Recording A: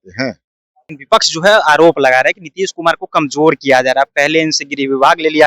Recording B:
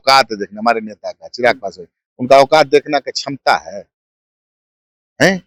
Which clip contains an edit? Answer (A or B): A